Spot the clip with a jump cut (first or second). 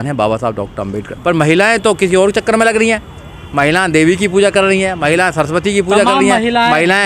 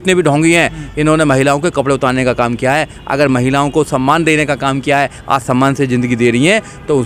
first